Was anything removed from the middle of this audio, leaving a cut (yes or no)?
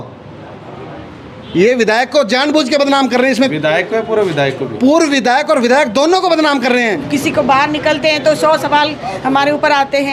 yes